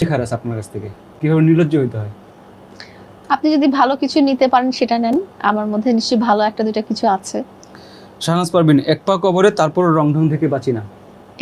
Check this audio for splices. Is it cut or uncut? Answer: uncut